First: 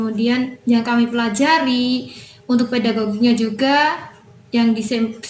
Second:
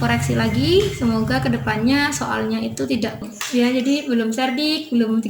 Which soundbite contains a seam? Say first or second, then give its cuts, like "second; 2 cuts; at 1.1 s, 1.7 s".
second; 1 cut; at 3.4 s